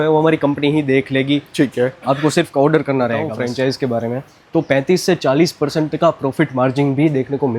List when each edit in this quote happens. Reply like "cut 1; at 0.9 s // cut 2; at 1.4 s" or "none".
cut 1; at 3.3 s